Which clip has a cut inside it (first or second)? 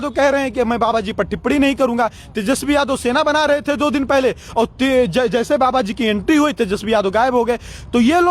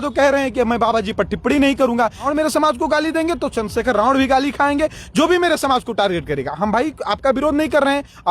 second